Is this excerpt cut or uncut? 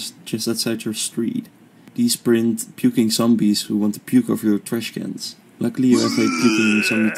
uncut